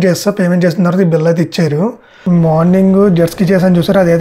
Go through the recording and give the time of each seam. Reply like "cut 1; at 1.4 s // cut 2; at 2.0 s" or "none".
cut 1; at 2.1 s